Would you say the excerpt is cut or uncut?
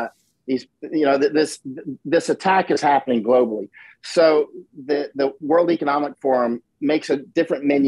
uncut